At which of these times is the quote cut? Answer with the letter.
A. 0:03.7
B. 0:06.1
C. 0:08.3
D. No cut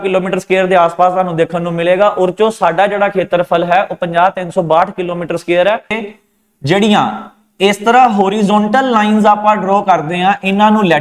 B